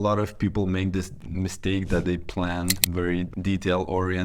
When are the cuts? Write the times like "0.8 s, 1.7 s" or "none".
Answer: 1.2 s, 3.3 s